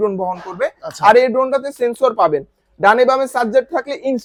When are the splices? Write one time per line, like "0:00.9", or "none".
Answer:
none